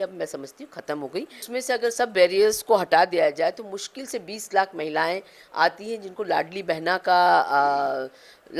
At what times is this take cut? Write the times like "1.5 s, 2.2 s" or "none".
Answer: 1.5 s